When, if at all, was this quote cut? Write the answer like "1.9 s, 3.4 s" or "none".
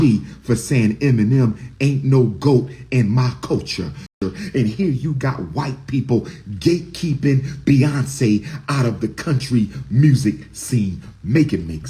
4.1 s